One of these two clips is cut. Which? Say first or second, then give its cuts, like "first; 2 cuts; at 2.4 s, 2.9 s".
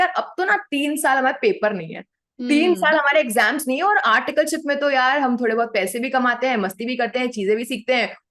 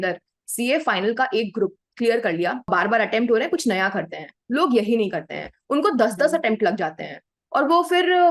second; 1 cut; at 2.7 s